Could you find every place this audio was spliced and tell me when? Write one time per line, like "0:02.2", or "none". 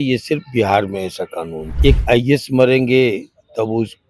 0:01.8